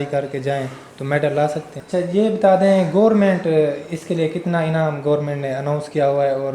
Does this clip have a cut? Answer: yes; 1 cut; at 1.8 s

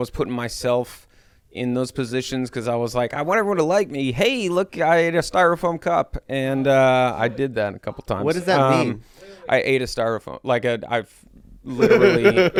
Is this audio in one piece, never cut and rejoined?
yes; 0 cuts

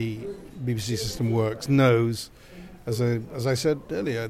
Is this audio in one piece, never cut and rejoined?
yes; 0 cuts

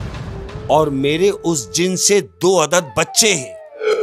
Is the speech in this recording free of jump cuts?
yes; 0 cuts

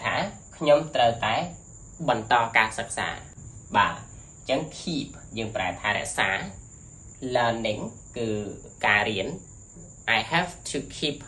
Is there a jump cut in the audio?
no; 0 cuts

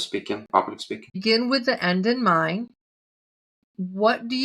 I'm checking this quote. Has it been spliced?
yes; 1 cut; at 1.2 s

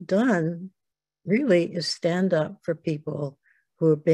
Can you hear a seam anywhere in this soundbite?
no; 0 cuts

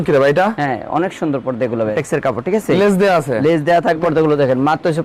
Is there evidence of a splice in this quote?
yes; 2 cuts; at 1.9 s, 4.0 s

